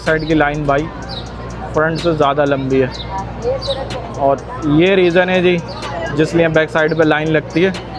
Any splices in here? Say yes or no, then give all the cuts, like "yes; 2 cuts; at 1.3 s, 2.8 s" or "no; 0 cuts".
no; 0 cuts